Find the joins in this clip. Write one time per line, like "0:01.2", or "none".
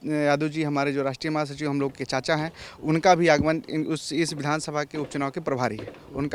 none